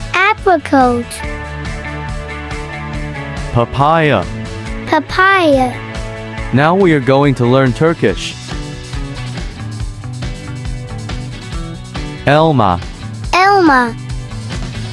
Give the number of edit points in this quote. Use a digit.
3